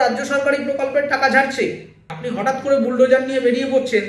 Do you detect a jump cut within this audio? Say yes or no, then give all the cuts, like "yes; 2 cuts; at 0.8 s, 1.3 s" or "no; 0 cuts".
yes; 1 cut; at 2.2 s